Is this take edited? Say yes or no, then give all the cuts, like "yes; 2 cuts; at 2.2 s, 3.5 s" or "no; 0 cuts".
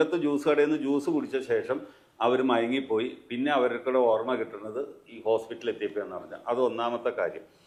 no; 0 cuts